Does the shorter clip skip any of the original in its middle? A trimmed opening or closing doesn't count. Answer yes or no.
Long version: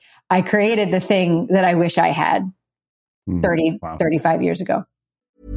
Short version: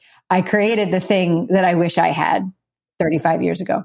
yes